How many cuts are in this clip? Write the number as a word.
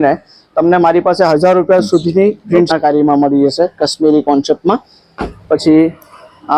one